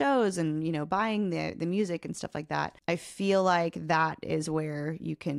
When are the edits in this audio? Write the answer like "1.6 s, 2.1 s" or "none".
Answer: 2.8 s